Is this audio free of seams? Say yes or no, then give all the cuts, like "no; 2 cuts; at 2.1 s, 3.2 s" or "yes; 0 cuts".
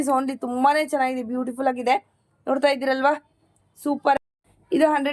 no; 1 cut; at 4.2 s